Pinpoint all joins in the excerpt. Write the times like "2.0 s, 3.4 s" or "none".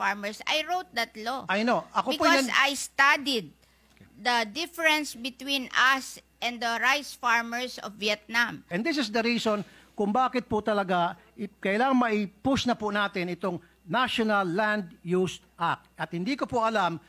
8.7 s